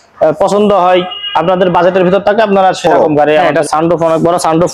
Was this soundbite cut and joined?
yes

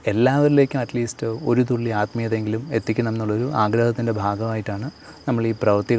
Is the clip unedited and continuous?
yes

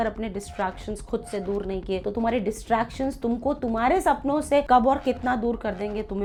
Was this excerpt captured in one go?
yes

